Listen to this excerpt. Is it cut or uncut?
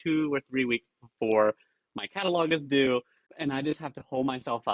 cut